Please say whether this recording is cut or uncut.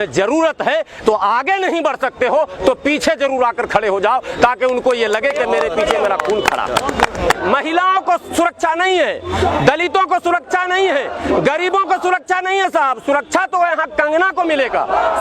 cut